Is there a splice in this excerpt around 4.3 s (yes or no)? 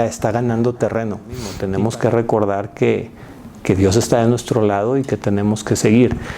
no